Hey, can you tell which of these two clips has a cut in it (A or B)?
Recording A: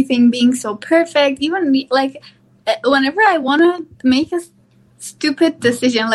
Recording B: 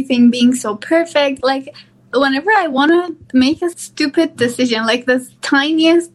B